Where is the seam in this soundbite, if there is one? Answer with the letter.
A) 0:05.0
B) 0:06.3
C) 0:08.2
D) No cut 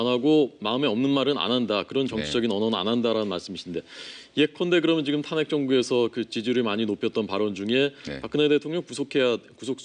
A